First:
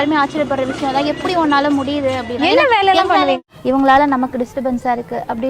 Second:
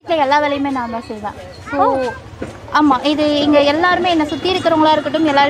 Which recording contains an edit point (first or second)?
first